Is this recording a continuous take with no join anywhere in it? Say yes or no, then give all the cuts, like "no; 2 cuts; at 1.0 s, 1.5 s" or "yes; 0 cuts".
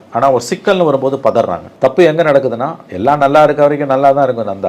no; 1 cut; at 1.6 s